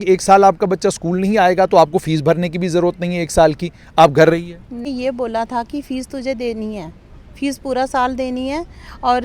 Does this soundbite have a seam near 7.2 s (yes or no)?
no